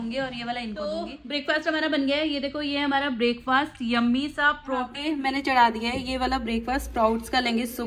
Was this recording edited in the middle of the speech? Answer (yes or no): yes